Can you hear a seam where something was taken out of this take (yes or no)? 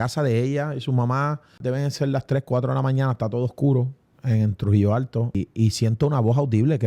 yes